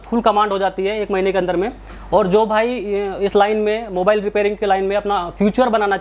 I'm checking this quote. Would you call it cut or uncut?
uncut